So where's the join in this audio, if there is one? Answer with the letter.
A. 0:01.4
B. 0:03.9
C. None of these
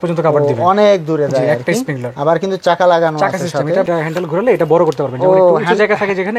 B